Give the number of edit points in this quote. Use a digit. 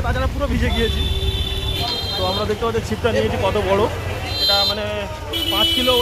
2